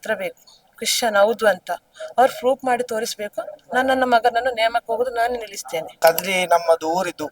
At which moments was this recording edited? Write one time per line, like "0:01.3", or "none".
0:05.9